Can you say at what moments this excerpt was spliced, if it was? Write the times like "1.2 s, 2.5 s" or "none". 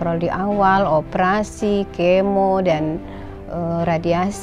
none

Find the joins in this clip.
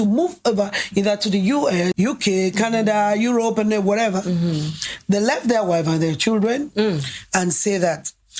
none

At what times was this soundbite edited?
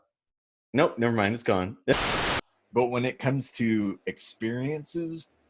2.0 s

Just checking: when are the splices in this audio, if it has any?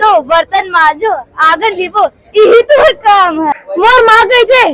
3.5 s

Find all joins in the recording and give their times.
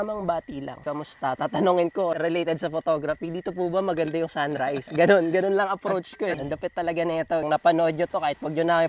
0.8 s, 6.4 s, 7.4 s

